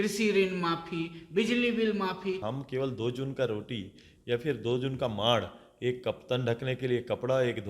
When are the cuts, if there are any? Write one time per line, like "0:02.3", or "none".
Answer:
0:02.4